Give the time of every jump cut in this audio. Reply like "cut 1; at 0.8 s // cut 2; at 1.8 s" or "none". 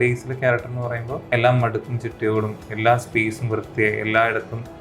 cut 1; at 1.1 s